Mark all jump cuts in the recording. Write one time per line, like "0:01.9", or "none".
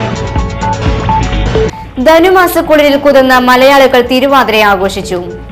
0:01.0

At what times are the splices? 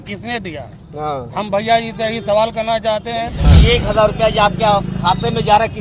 0:03.5

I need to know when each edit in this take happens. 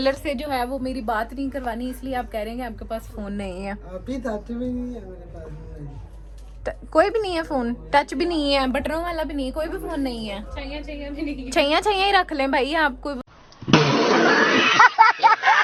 none

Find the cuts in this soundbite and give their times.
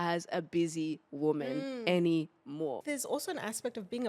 0:02.8

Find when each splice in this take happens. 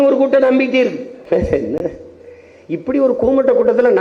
0:01.1

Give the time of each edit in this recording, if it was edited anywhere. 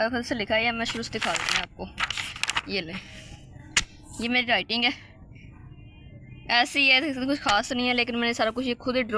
none

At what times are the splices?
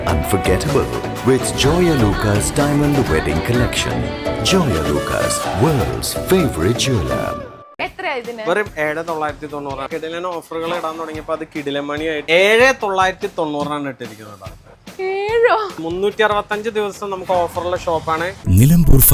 none

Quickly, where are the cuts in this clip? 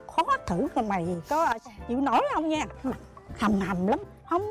none

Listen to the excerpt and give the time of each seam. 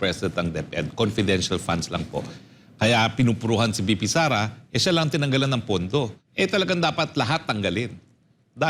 0:06.2

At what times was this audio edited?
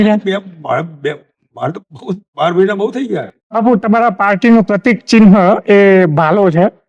0:03.4

